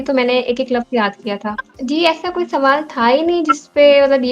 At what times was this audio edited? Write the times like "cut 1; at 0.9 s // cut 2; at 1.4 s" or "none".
cut 1; at 1.6 s